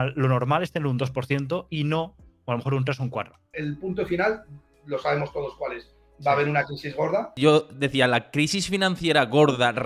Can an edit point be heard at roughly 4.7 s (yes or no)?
no